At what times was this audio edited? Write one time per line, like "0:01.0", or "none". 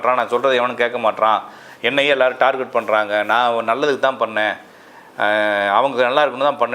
none